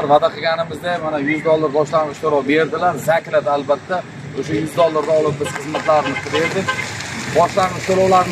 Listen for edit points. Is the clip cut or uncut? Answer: uncut